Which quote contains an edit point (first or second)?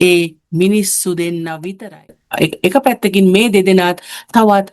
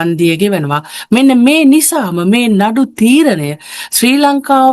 first